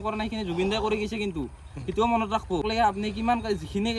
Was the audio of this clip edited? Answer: yes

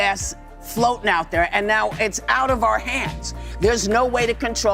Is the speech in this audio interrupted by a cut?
no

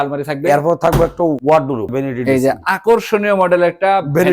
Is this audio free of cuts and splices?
no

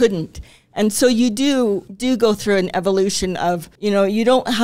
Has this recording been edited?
yes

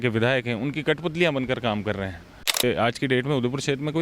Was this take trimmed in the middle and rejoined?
yes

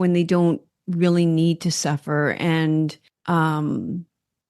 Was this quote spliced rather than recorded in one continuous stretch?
yes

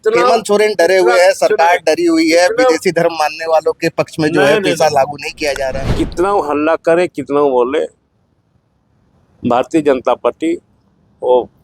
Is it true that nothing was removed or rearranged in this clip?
no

